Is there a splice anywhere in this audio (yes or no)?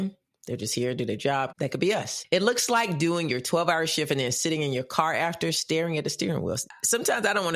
yes